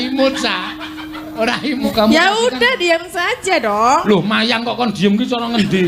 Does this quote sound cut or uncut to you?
cut